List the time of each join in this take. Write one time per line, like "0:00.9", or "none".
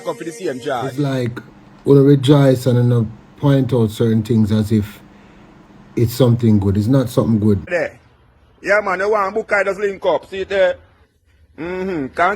0:01.1
0:07.7